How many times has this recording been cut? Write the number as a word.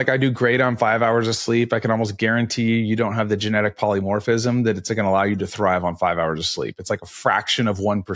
zero